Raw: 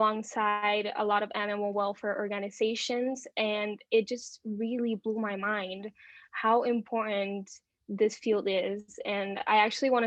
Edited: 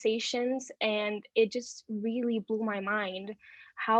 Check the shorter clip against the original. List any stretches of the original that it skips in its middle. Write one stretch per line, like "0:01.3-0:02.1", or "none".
none